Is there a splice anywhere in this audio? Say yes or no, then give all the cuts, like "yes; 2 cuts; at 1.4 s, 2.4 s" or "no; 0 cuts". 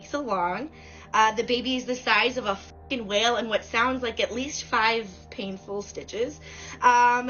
no; 0 cuts